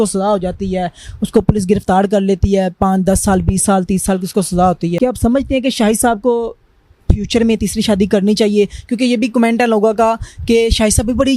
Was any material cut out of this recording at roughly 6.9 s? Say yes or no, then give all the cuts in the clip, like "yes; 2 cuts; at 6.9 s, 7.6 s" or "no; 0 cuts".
no; 1 cut; at 4.9 s